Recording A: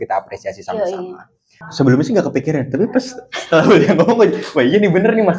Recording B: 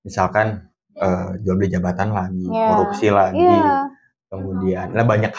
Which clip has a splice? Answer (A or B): A